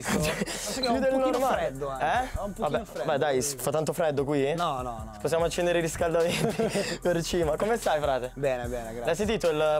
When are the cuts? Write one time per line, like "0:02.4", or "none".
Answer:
none

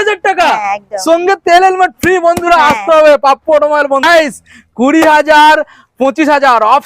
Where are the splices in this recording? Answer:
0:04.0

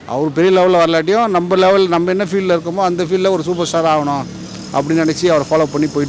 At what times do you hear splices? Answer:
none

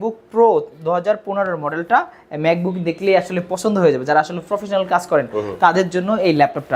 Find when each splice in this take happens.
none

